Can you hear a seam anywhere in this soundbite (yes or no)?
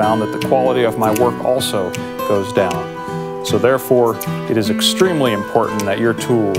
no